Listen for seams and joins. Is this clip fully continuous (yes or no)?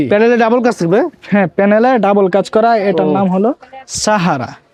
yes